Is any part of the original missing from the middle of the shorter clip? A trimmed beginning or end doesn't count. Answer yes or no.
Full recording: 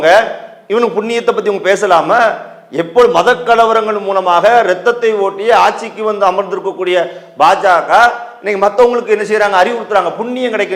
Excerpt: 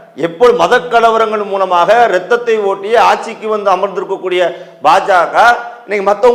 no